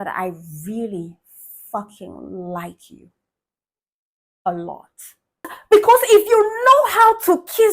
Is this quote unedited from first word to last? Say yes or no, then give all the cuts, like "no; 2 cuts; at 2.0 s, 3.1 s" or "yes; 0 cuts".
no; 1 cut; at 5.4 s